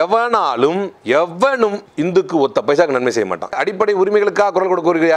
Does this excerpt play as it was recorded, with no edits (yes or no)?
no